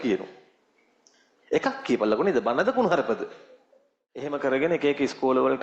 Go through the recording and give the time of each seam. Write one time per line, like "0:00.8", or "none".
0:04.3